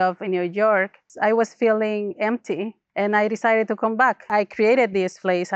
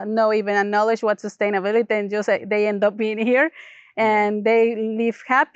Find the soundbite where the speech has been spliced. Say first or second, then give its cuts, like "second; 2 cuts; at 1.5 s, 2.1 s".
first; 3 cuts; at 1.1 s, 2.8 s, 4.3 s